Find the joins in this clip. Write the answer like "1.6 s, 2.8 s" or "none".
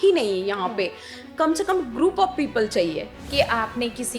3.2 s